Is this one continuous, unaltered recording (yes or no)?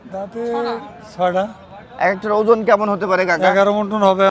yes